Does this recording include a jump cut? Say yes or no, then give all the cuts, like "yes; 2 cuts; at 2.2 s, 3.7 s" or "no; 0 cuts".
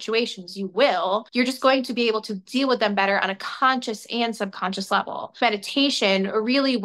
yes; 2 cuts; at 1.3 s, 5.4 s